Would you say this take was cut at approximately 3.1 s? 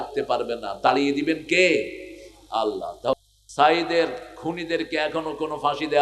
yes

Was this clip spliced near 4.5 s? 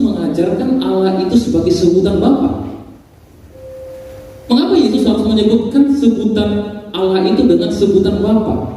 yes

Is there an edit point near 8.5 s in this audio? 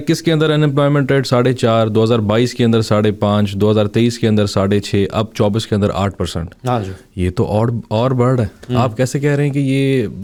no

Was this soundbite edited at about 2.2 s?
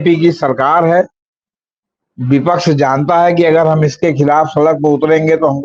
no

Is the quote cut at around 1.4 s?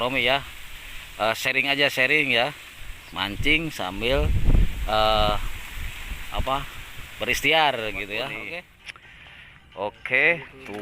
no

